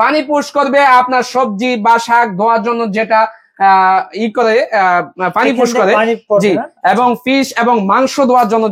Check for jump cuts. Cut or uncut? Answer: uncut